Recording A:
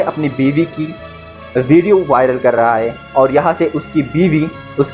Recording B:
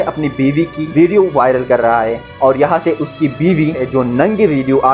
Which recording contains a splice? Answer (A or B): B